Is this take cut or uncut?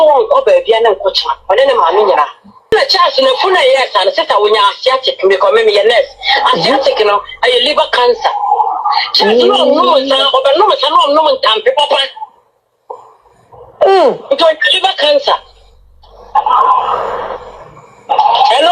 cut